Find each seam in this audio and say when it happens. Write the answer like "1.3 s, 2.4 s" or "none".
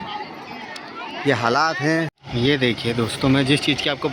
2.2 s